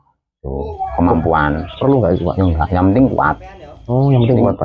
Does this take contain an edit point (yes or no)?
yes